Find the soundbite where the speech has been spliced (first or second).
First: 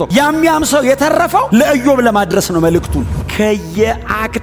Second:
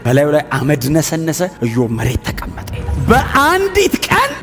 second